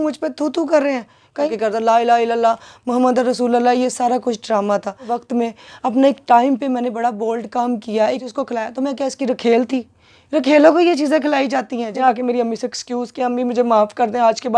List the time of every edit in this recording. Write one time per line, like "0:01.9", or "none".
0:01.5
0:05.2
0:08.2
0:11.9